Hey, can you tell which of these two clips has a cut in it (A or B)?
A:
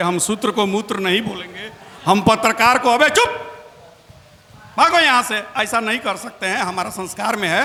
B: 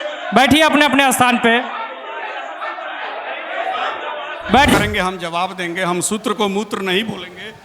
B